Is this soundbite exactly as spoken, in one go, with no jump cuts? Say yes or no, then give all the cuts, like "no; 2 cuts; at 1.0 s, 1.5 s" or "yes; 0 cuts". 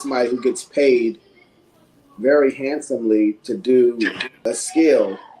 no; 1 cut; at 4.3 s